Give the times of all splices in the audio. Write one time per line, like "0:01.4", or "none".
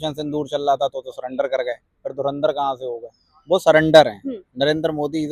none